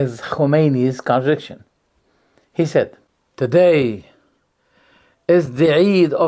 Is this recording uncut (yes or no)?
yes